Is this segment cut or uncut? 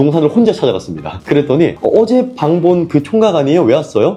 uncut